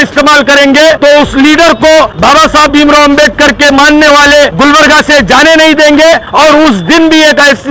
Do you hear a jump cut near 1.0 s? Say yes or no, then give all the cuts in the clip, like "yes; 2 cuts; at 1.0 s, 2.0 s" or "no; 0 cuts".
yes; 4 cuts; at 1.0 s, 2.1 s, 4.5 s, 6.3 s